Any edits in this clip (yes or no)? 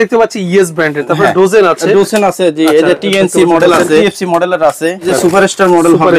yes